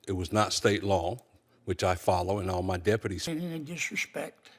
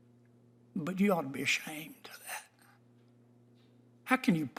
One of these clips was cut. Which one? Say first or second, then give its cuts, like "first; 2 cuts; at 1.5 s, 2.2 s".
first; 1 cut; at 3.2 s